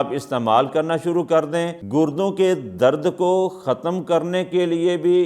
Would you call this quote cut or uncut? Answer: cut